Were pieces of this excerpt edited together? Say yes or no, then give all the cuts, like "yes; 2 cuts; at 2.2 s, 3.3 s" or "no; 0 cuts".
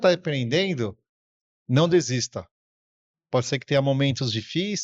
no; 0 cuts